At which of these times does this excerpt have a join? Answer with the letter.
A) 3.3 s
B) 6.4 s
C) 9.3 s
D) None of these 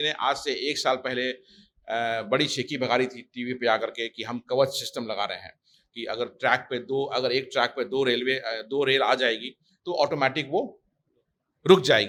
D